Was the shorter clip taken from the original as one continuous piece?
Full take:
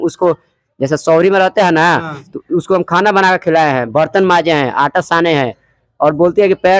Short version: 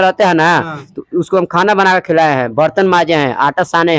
yes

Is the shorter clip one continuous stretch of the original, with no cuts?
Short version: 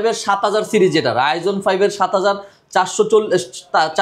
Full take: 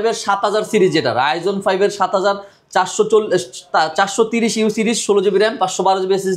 yes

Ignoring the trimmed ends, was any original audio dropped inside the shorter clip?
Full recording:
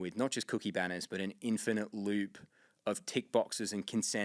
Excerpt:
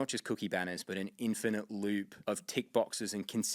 yes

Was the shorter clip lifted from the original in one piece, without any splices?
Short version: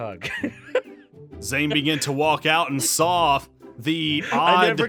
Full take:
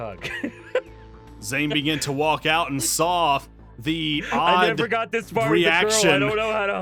yes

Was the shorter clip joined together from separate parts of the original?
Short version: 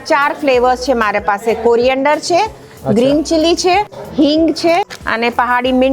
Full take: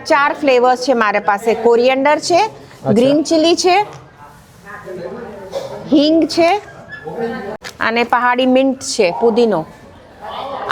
yes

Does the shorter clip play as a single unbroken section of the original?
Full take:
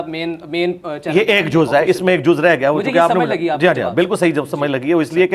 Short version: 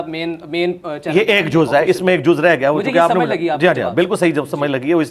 yes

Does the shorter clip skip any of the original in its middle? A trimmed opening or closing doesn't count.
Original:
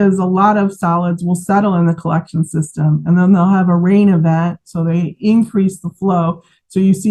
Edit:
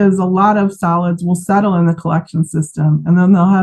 no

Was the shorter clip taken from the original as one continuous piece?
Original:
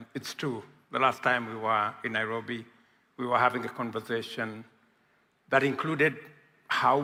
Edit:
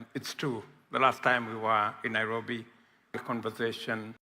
no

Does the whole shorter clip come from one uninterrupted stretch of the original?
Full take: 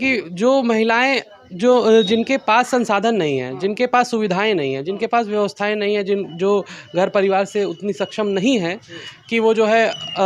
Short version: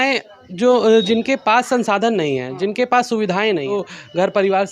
no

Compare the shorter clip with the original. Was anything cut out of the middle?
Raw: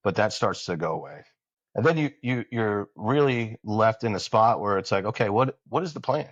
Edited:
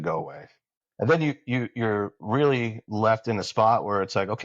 no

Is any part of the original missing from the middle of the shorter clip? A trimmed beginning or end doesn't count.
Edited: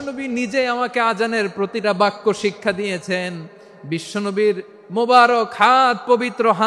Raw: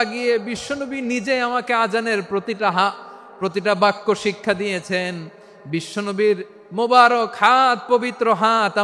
yes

